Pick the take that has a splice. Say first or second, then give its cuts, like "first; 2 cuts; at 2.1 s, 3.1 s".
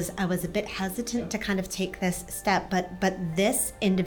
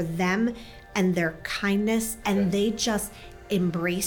second; 1 cut; at 2.2 s